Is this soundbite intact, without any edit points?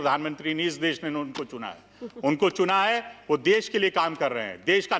yes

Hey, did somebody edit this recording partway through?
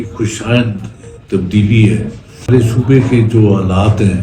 yes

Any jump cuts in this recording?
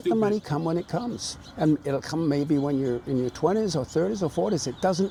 no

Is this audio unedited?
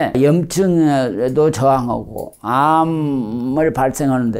yes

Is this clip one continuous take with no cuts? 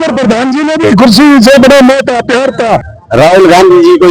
no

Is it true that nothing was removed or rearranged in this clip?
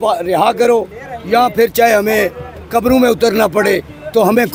yes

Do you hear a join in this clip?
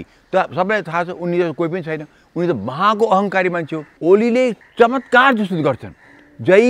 yes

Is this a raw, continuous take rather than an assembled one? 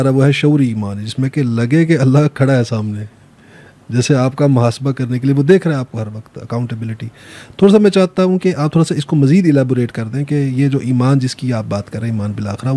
yes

